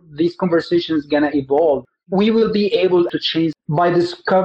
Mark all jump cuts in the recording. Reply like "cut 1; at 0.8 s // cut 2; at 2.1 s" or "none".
cut 1; at 1.8 s // cut 2; at 3.1 s